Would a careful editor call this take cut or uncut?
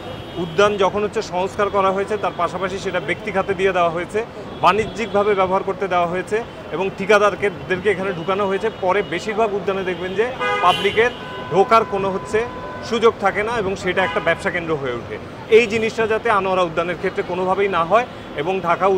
uncut